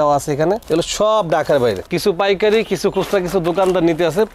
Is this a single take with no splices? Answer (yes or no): no